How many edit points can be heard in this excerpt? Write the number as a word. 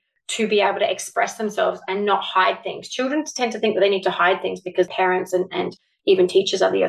one